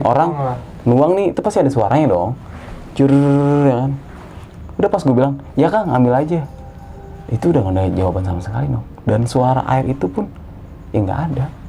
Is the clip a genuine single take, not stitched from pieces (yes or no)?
yes